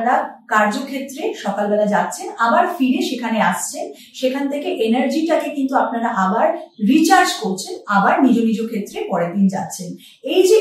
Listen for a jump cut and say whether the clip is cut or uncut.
uncut